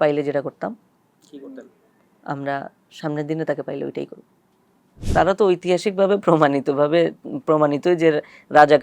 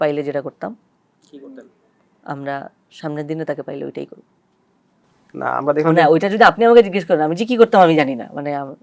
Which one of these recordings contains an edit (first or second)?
first